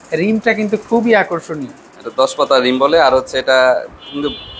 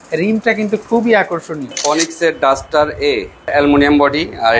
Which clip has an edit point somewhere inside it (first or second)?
second